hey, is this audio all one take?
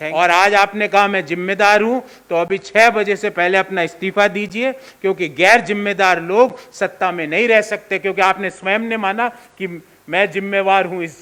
yes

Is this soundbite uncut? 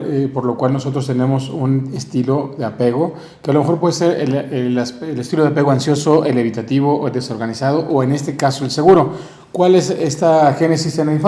yes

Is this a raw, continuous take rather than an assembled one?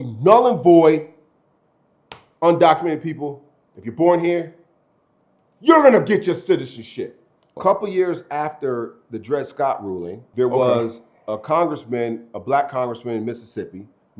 yes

